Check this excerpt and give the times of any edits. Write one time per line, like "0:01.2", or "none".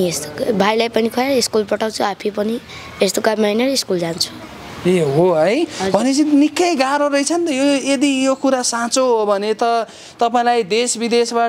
none